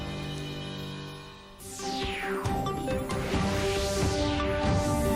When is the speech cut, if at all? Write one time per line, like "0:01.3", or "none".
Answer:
0:01.4